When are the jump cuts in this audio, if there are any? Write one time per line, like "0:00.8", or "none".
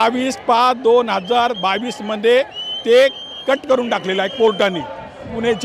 none

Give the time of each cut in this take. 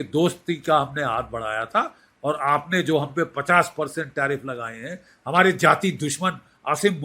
none

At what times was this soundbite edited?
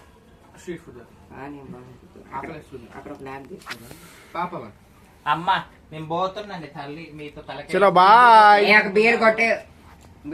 none

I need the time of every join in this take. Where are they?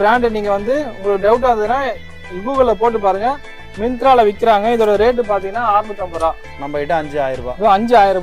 none

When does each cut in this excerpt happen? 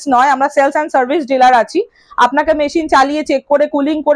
none

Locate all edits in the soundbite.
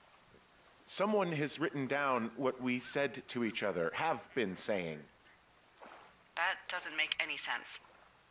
none

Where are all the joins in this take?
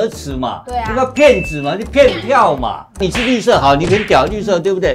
0:03.0

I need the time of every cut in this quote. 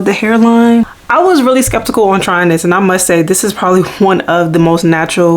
0:01.0

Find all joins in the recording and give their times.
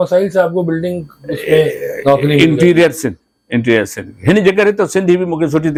none

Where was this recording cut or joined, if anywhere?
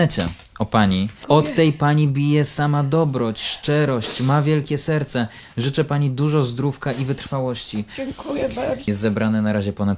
0:01.2
0:08.8

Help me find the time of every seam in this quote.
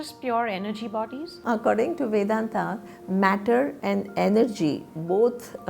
0:01.4

